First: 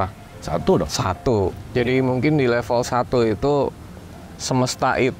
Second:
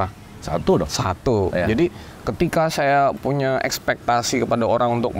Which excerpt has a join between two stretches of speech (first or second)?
first